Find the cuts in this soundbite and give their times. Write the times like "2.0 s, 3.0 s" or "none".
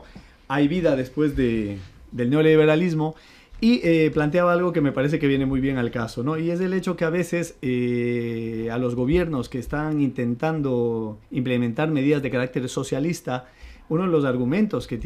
12.6 s